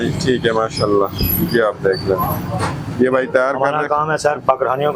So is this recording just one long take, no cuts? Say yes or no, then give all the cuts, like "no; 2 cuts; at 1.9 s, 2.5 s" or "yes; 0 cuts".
yes; 0 cuts